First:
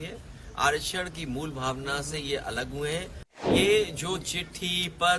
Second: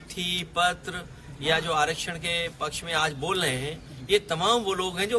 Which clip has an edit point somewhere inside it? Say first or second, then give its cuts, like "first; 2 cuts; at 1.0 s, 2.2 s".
first; 1 cut; at 3.4 s